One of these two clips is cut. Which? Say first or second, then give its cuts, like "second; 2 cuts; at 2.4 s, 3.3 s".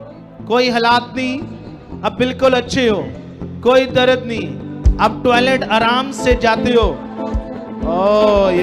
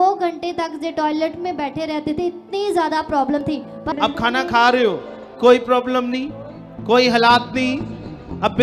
second; 1 cut; at 3.8 s